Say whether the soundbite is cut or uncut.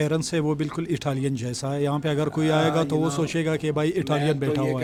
uncut